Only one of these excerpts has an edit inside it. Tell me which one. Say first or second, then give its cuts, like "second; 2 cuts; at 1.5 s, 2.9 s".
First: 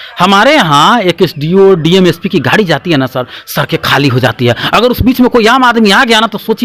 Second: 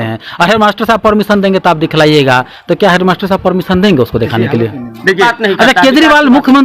second; 1 cut; at 5.2 s